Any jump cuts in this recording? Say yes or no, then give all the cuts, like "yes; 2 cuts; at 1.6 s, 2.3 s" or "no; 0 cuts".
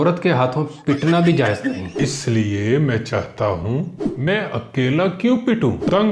yes; 1 cut; at 1.9 s